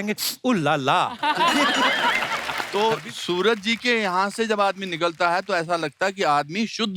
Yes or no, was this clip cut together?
yes